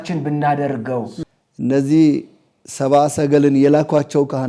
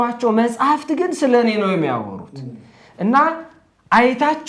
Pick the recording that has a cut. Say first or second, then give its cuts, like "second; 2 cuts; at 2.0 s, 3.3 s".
first; 1 cut; at 1.1 s